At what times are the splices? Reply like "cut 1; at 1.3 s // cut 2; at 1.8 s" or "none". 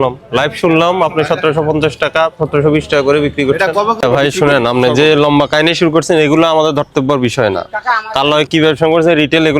cut 1; at 4.0 s